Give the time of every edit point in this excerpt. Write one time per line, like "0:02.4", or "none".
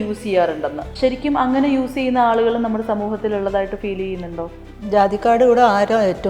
0:00.9